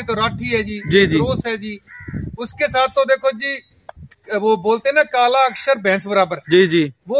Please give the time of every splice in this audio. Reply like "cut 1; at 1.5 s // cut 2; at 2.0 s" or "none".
none